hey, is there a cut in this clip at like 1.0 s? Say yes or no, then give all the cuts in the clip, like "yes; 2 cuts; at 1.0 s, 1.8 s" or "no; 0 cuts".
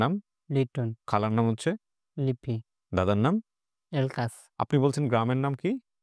yes; 3 cuts; at 1.0 s, 2.8 s, 4.4 s